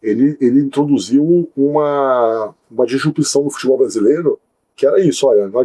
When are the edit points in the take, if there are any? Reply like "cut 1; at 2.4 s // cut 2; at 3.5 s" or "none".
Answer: none